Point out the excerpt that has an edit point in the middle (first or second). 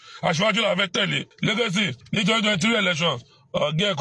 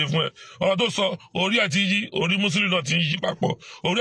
first